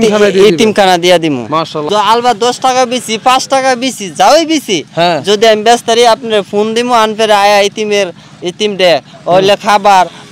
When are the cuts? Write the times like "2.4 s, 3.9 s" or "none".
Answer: 1.9 s